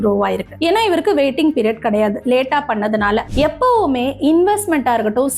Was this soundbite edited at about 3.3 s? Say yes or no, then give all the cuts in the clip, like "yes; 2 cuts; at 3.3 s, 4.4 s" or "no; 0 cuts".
yes; 1 cut; at 3.3 s